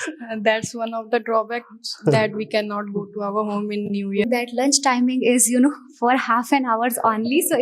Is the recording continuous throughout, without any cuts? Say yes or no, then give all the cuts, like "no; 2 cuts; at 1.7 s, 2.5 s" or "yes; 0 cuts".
no; 1 cut; at 4.2 s